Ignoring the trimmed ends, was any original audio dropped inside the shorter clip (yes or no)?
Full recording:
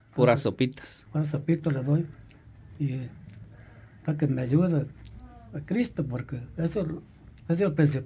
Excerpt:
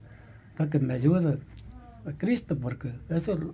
no